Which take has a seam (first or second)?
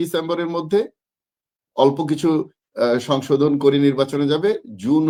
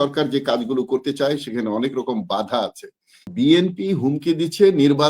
second